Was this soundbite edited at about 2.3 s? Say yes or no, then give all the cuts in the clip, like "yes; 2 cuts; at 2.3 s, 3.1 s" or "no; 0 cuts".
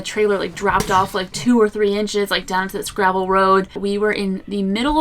no; 1 cut; at 3.8 s